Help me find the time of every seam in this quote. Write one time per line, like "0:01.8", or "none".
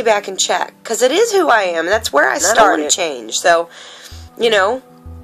0:02.9